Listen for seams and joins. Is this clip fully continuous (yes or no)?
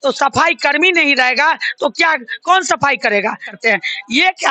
no